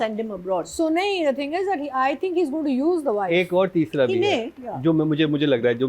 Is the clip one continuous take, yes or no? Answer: yes